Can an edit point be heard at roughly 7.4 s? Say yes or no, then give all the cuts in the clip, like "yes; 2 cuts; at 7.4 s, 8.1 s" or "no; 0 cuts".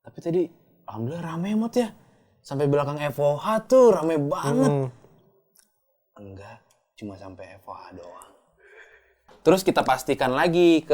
no; 1 cut; at 9.3 s